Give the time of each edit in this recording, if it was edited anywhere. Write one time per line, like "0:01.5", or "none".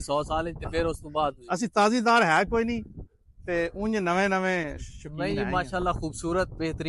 none